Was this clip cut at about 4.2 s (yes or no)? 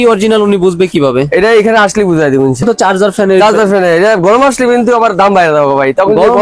no